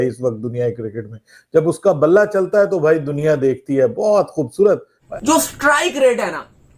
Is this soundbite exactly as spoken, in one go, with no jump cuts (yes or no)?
no